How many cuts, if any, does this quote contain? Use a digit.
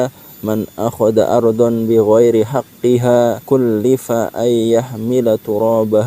1